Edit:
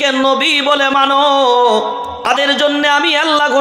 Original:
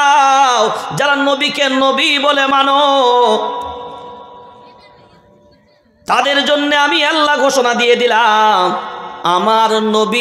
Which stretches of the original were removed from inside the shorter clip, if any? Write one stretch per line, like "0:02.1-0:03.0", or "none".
0:03.8-0:06.2